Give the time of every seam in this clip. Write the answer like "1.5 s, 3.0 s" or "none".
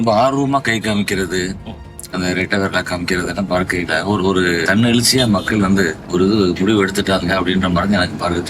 4.6 s, 6.0 s